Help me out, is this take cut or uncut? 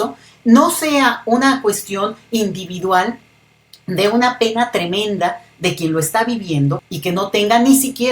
cut